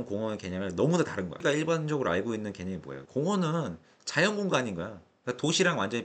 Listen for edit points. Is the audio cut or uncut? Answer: cut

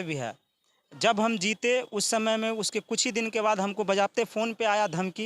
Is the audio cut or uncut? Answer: uncut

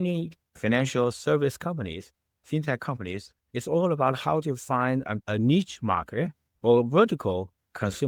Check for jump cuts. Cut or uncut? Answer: uncut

